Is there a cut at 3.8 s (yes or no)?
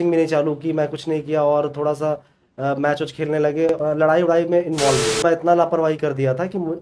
yes